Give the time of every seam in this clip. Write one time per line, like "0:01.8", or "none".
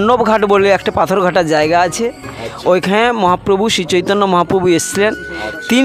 none